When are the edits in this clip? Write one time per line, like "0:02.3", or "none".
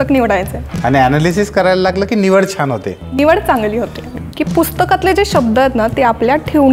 0:04.3